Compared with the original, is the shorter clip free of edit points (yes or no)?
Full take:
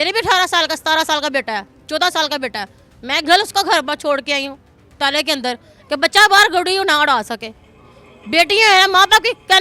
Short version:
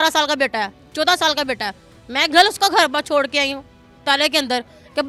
yes